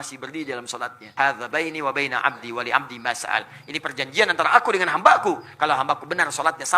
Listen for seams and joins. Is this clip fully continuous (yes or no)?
no